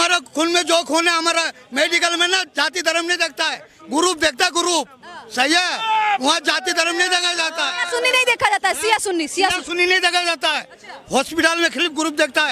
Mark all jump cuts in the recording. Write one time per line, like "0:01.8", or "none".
none